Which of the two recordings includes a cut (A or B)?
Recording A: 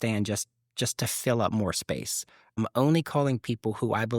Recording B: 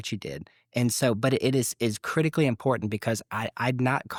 A